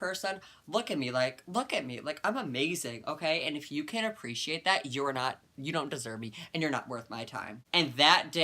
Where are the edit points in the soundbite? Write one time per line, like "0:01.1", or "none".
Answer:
0:07.1